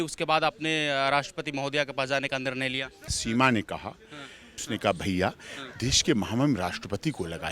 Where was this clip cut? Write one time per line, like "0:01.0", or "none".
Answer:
0:03.2
0:04.6